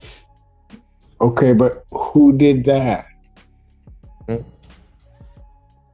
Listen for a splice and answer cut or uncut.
uncut